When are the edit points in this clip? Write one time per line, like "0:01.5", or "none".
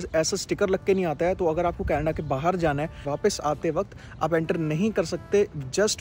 0:03.1

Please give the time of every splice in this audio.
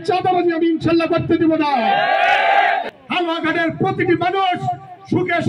0:03.0

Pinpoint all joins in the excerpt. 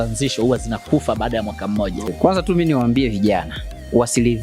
0:02.1

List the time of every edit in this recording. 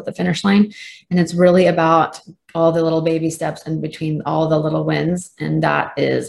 none

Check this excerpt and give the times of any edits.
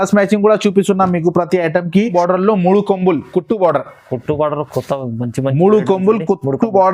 0:02.1

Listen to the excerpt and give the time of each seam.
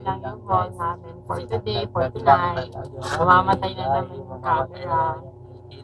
none

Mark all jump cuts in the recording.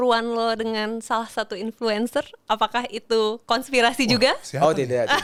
none

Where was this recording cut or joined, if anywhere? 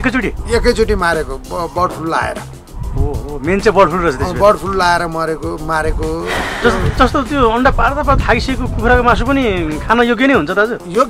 0:06.4

